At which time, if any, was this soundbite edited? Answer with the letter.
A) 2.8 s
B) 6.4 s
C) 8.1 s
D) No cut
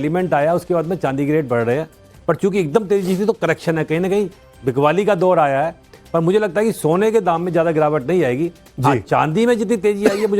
B